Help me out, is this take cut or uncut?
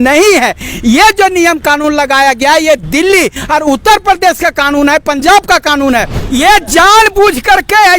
cut